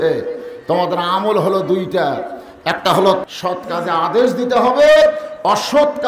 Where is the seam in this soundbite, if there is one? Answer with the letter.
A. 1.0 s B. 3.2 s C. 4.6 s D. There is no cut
B